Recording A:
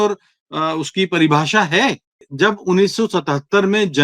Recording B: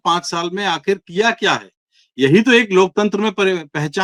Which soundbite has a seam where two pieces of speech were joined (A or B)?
A